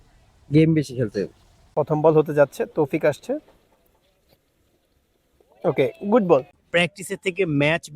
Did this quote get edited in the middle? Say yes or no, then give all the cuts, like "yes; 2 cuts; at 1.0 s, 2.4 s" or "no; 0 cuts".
yes; 2 cuts; at 1.7 s, 6.6 s